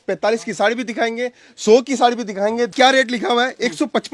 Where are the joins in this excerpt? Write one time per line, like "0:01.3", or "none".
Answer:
0:02.7